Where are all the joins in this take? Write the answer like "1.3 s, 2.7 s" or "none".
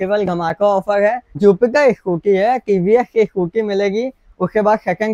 1.3 s